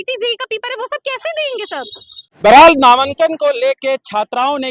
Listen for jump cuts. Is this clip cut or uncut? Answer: uncut